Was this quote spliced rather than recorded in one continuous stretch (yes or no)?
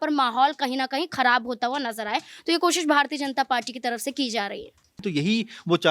yes